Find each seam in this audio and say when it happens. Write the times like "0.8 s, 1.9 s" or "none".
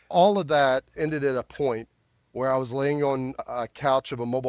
0.9 s, 3.4 s